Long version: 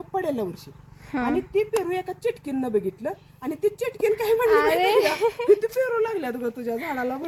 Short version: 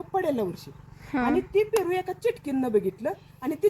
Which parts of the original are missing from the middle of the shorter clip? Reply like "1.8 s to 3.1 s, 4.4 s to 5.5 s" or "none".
none